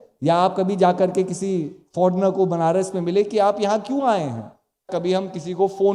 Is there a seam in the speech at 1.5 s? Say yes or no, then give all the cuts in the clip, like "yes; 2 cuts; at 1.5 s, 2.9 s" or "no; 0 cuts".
no; 1 cut; at 4.9 s